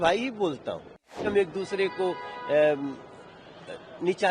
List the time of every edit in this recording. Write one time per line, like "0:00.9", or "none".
0:01.2